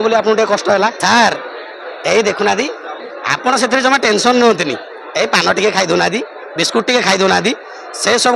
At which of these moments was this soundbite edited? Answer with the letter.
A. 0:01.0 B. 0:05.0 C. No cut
A